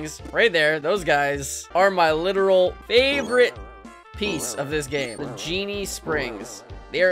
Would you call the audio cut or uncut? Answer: cut